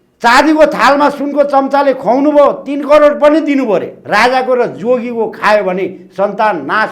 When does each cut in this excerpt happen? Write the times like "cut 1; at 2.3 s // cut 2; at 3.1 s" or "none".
cut 1; at 4.0 s